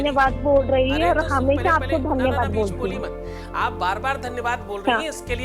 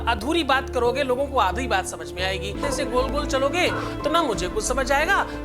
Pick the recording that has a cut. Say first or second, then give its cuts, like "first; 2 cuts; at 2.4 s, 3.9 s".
second; 1 cut; at 2.6 s